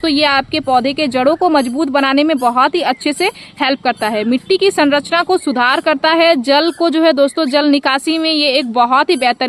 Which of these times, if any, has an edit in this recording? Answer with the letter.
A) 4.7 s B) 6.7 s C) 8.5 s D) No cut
D